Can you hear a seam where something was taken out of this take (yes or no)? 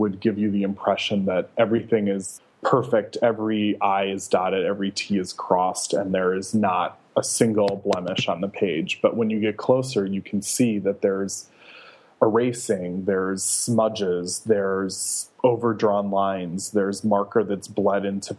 yes